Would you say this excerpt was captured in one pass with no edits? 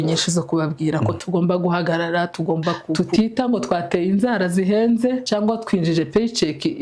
no; 3 cuts; at 1.2 s, 3.0 s, 5.2 s

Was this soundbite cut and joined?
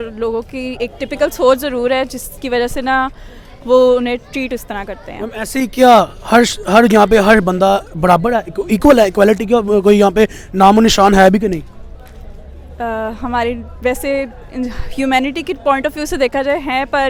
no; 0 cuts

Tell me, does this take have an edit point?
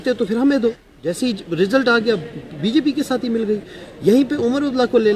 no; 0 cuts

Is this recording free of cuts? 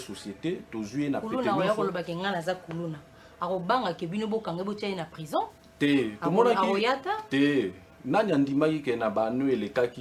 yes; 0 cuts

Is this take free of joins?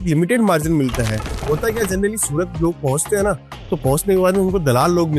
no; 1 cut; at 1.3 s

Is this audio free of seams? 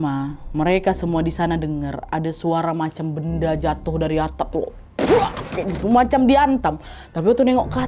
yes; 0 cuts

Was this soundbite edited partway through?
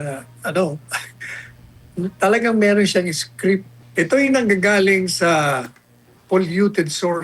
yes; 1 cut; at 3.8 s

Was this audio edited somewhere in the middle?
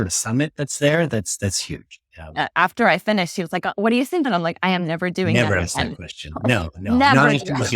yes; 1 cut; at 4.3 s

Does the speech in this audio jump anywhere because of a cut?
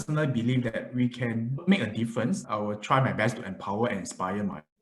yes; 1 cut; at 2.4 s

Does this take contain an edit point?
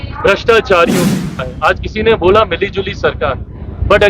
yes; 1 cut; at 1.4 s

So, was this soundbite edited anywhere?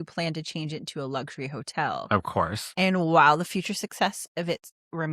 yes; 1 cut; at 2.6 s

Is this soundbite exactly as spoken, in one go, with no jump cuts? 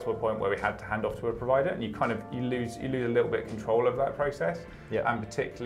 yes; 0 cuts

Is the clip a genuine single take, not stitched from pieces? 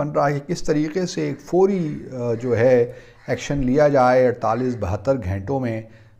yes; 0 cuts

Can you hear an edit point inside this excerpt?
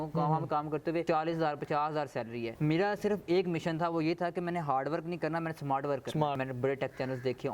yes; 3 cuts; at 1.0 s, 2.5 s, 6.4 s

